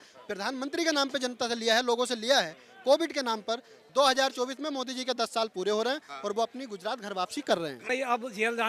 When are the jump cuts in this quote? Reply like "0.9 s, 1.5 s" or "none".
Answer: 3.7 s, 7.9 s